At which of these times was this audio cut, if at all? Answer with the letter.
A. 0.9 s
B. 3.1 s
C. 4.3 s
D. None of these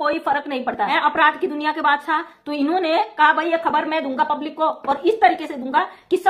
A